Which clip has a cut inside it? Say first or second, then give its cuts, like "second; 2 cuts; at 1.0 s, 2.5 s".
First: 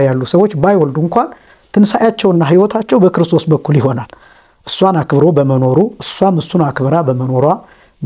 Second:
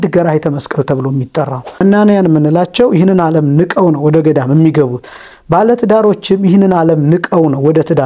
second; 1 cut; at 1.8 s